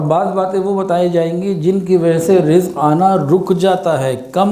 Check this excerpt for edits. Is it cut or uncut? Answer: uncut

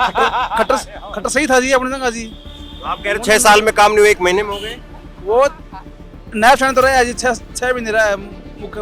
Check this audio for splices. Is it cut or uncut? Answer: uncut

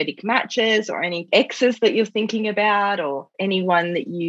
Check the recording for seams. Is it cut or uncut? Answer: cut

